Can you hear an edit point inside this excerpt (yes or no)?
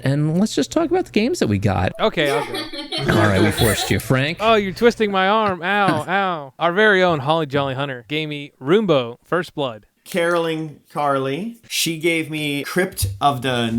yes